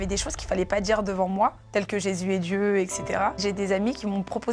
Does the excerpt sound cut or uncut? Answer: cut